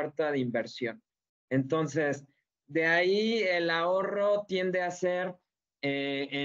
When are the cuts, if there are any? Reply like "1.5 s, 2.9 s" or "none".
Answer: none